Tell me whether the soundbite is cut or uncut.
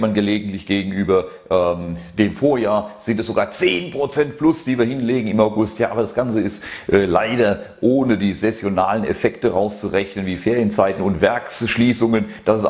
cut